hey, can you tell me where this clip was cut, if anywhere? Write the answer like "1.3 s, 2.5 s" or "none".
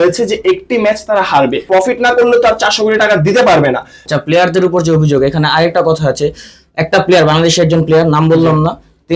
1.6 s, 4.0 s